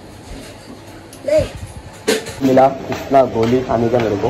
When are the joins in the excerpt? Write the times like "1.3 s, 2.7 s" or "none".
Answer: 2.3 s